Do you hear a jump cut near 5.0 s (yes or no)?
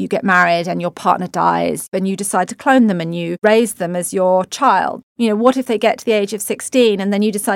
yes